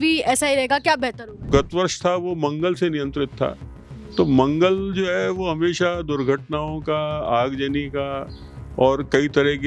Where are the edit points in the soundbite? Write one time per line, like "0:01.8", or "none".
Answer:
0:01.5